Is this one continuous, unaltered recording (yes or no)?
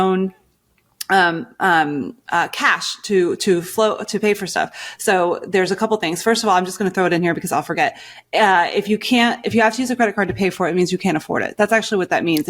yes